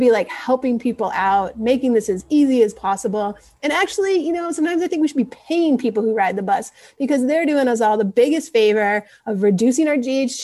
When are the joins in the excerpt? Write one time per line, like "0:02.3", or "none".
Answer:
none